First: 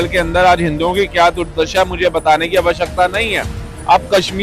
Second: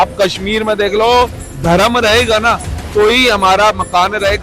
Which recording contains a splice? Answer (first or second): second